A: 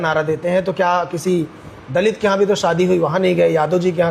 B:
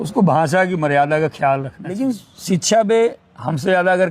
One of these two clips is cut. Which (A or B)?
B